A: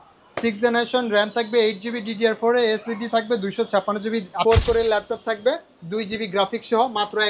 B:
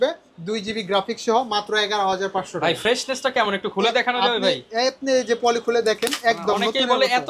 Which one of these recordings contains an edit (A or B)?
A